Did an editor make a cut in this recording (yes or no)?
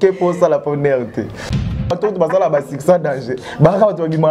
yes